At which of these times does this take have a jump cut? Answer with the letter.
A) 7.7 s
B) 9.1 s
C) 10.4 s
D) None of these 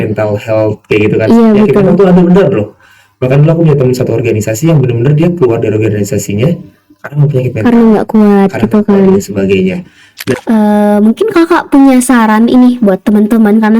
C